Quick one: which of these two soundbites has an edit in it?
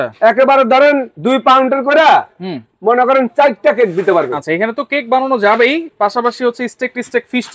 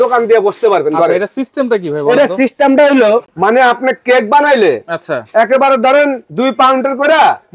second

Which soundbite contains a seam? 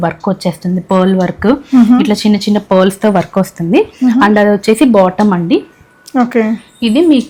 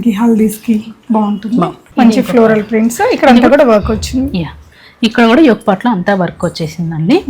second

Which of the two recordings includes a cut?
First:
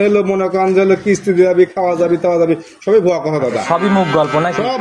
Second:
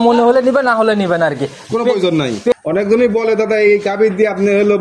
second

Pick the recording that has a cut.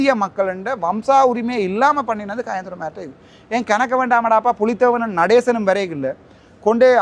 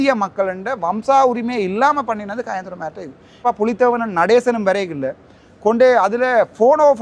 second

